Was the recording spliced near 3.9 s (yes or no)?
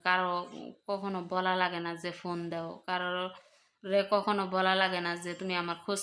no